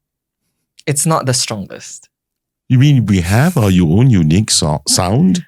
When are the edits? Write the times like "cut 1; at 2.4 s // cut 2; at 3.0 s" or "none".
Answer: none